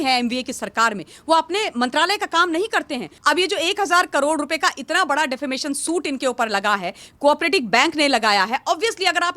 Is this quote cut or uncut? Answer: cut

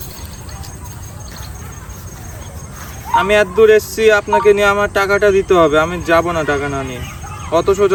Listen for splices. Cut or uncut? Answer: uncut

